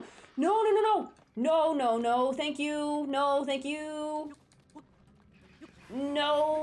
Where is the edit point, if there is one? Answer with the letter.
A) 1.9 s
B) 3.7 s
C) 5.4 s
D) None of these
D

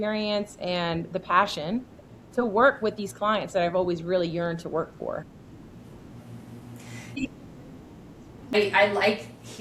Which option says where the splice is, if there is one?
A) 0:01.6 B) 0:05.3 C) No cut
C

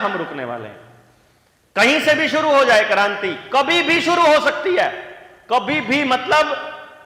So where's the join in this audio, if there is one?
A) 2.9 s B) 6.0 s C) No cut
C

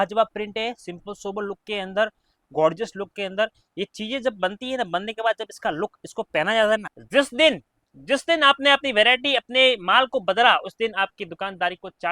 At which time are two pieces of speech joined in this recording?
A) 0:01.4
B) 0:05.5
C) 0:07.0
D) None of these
C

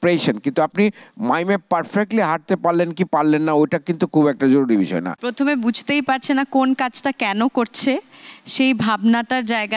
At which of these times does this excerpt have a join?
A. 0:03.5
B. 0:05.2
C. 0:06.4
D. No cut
B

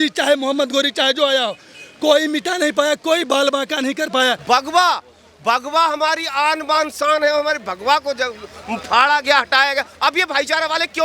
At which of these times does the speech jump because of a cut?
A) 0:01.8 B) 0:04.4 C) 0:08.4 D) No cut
B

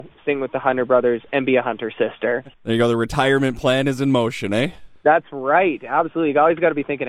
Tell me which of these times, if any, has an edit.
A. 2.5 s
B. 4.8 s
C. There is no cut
A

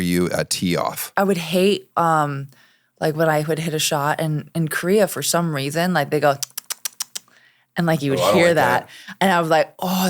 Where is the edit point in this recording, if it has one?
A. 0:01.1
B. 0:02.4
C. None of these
A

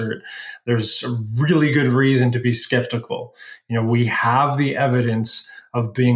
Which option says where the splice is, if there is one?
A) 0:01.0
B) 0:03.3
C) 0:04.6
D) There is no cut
D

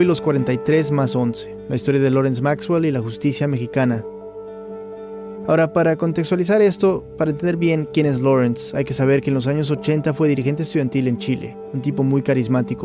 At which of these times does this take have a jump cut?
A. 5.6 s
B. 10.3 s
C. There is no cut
A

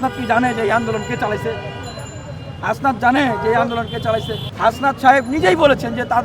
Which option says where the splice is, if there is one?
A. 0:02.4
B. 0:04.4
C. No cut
B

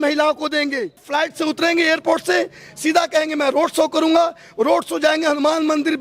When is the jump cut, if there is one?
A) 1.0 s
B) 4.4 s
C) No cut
A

